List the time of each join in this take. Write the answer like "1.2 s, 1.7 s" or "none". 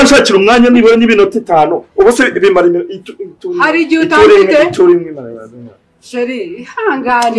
none